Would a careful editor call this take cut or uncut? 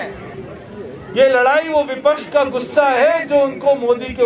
uncut